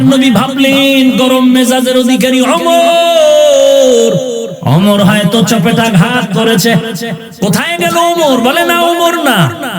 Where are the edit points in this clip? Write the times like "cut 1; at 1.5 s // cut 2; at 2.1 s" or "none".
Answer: cut 1; at 4.5 s // cut 2; at 7.2 s